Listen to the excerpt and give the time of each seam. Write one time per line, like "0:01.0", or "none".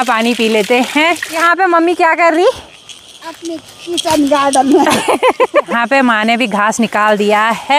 0:01.4
0:05.7

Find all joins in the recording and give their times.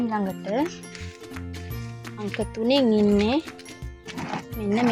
0:00.7
0:02.2

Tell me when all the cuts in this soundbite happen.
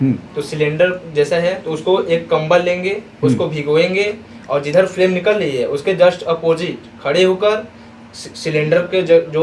none

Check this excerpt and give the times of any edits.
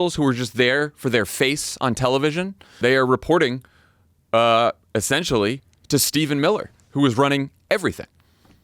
0:02.7

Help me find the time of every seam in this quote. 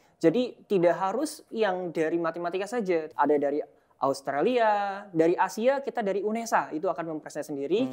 0:03.1

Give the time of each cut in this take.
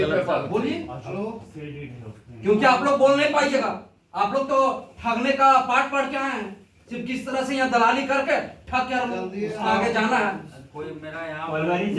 none

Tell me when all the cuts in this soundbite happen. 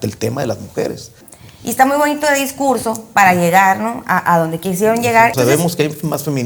0:01.2
0:05.3

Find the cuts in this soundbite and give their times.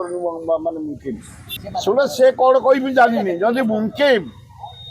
0:01.6

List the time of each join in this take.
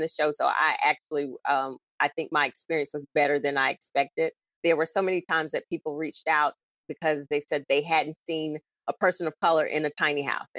0:04.5

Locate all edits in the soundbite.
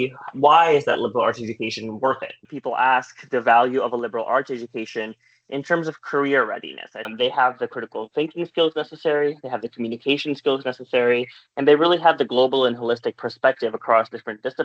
0:02.4
0:07.1

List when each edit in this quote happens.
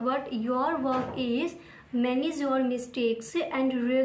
none

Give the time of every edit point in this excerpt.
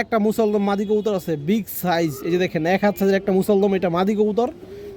none

